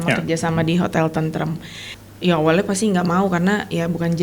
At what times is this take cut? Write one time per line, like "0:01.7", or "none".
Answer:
0:01.9